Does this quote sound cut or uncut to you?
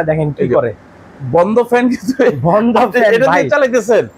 uncut